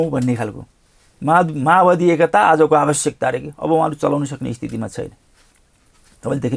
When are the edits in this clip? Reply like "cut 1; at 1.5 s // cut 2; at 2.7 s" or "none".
none